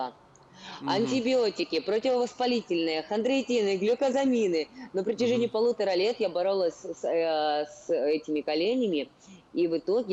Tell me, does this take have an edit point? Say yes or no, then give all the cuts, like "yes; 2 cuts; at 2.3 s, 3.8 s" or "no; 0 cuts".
no; 0 cuts